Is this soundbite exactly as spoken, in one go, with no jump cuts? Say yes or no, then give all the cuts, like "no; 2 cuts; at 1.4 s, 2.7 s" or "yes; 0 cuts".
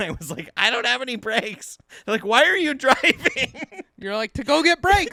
yes; 0 cuts